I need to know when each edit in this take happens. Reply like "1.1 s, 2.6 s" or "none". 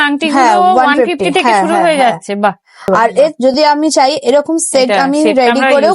3.3 s